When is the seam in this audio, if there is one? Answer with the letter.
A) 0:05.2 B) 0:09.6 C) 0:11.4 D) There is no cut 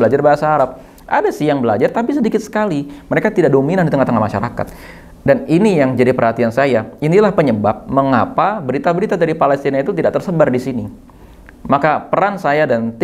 D